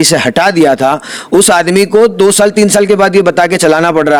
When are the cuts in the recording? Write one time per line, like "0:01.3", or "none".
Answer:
none